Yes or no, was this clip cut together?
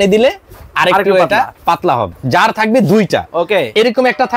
yes